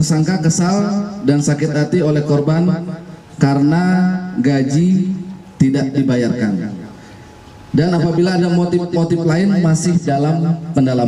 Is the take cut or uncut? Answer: uncut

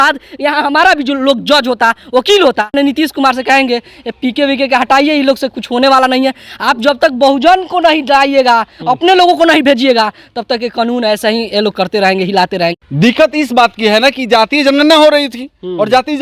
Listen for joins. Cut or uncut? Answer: cut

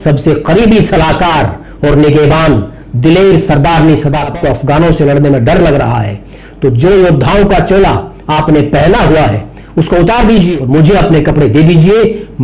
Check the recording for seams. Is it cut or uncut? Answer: cut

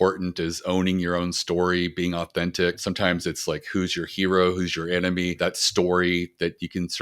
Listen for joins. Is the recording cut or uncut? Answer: cut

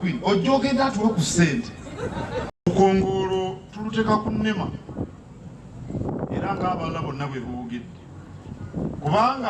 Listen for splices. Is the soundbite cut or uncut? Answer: cut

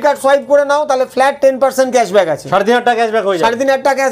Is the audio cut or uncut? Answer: uncut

